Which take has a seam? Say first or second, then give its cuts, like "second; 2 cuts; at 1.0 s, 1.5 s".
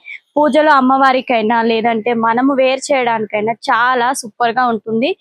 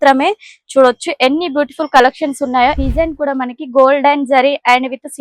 second; 1 cut; at 2.8 s